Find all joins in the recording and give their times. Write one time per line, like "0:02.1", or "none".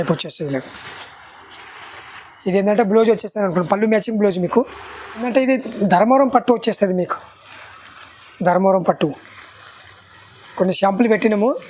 0:05.2